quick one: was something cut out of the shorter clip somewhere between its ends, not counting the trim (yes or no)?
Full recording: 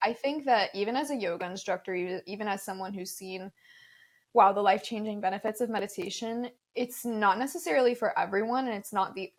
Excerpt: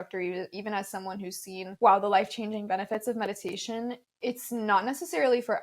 yes